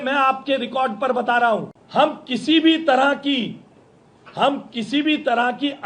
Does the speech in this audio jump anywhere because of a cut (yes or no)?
yes